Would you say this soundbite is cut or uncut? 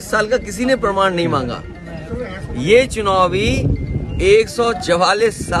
uncut